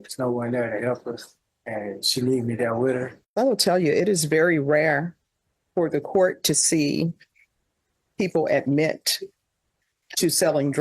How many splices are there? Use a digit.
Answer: 1